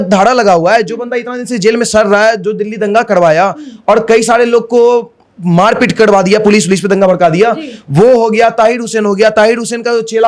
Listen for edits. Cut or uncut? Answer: uncut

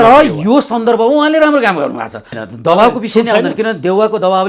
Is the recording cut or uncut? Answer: cut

